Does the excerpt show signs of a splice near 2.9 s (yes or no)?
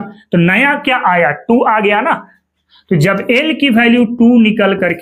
no